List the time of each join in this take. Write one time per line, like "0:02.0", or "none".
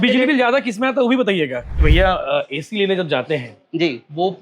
0:01.8